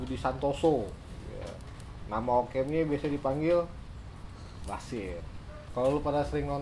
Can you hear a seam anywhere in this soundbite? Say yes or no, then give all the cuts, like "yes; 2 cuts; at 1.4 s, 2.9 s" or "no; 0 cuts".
yes; 1 cut; at 5.6 s